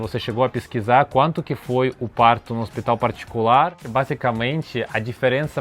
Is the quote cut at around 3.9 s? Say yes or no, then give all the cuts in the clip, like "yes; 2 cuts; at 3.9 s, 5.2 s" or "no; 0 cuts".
yes; 1 cut; at 3.9 s